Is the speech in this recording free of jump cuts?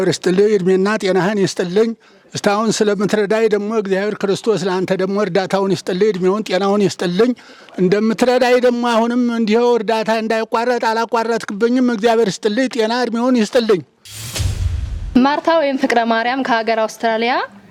yes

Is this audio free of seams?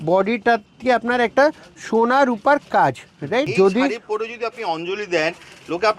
no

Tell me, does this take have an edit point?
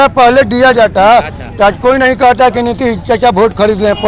no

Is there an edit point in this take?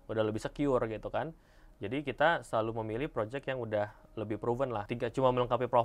yes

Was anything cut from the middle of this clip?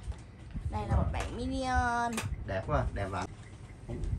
yes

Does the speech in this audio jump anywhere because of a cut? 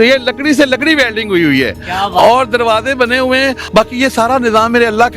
yes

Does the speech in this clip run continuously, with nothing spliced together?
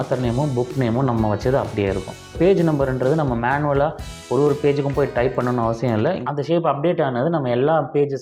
no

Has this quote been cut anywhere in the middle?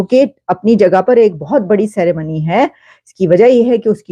no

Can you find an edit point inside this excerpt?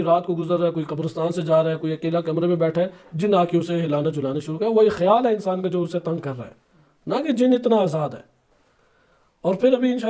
no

